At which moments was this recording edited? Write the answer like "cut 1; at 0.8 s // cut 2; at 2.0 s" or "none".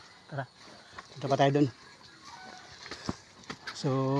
none